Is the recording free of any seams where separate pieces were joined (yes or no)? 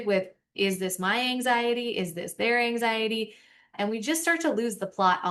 yes